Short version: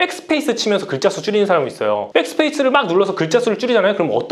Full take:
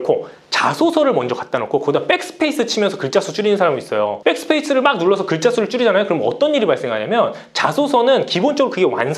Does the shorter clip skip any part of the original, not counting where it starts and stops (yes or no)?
no